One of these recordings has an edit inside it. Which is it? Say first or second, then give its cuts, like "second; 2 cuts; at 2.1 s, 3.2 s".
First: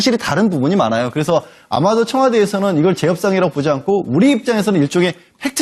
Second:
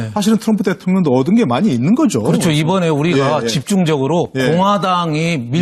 first; 1 cut; at 1.1 s